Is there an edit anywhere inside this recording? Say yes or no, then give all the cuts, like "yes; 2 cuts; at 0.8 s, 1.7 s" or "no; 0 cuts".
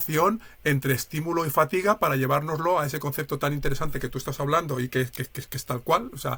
no; 0 cuts